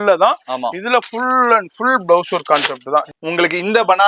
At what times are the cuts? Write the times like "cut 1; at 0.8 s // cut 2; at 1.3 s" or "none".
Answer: cut 1; at 3.1 s